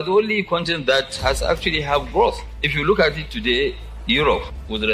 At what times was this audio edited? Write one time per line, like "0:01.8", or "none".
none